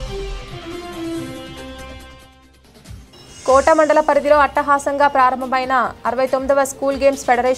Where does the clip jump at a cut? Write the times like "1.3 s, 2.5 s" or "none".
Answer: 3.0 s